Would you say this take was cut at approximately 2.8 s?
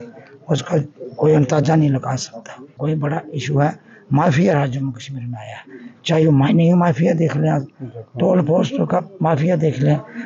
yes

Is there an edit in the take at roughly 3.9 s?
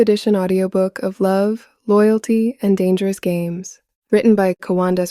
yes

